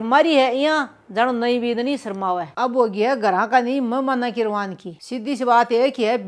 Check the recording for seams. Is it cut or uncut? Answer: cut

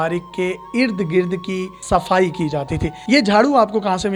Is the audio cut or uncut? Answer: uncut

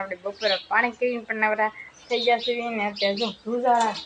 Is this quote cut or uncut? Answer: uncut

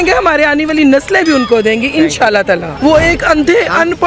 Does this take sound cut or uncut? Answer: cut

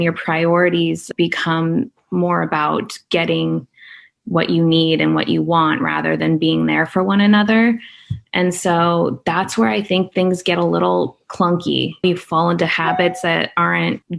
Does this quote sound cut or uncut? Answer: uncut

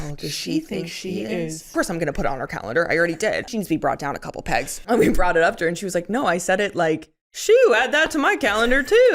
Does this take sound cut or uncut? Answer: cut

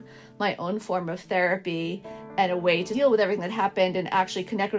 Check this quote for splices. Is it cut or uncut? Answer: cut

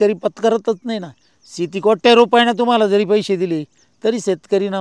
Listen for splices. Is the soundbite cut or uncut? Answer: uncut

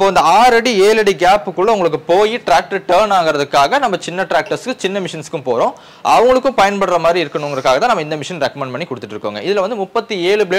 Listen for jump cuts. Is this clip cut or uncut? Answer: uncut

